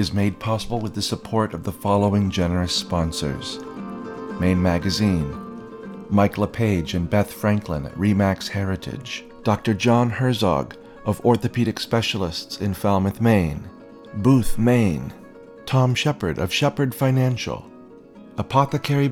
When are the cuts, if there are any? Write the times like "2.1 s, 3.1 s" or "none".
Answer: none